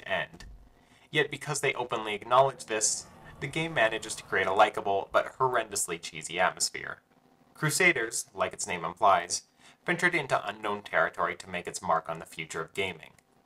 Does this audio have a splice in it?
yes; 1 cut; at 9.1 s

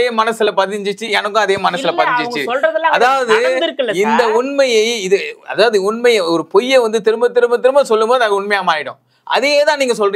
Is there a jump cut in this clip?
no; 0 cuts

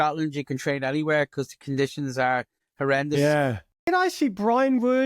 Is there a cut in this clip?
yes; 1 cut; at 3.9 s

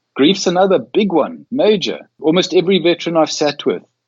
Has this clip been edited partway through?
yes; 2 cuts; at 1.4 s, 2.2 s

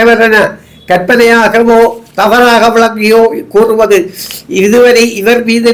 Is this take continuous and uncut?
yes; 0 cuts

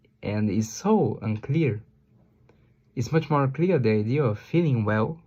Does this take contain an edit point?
no; 0 cuts

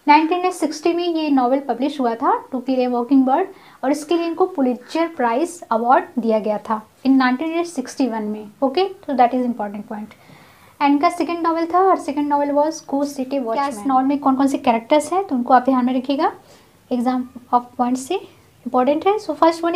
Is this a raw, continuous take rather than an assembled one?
no; 1 cut; at 13.7 s

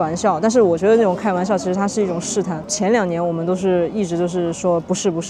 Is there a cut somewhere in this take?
no; 0 cuts

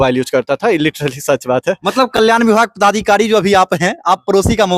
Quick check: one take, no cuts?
yes; 0 cuts

